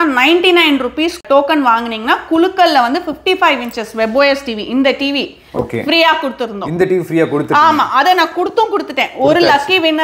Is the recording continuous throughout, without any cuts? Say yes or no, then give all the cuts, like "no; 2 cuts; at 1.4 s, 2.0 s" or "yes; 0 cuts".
yes; 0 cuts